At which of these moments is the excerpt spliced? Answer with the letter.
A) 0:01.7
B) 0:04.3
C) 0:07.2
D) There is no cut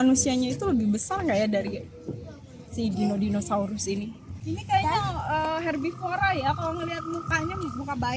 B